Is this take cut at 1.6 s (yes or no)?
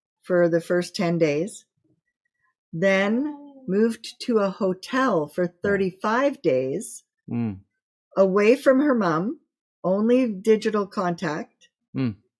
no